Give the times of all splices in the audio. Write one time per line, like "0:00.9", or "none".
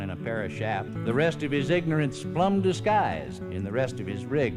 0:00.9
0:03.4